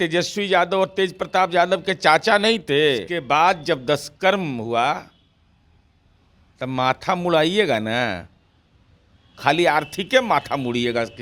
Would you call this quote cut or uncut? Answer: cut